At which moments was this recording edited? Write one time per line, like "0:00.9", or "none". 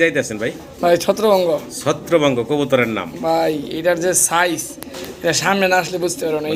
none